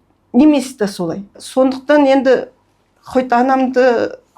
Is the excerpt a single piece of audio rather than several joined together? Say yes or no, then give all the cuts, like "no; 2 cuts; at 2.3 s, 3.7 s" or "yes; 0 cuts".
no; 1 cut; at 1.4 s